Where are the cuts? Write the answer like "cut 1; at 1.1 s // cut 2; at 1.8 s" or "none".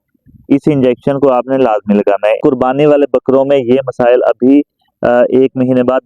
cut 1; at 2.4 s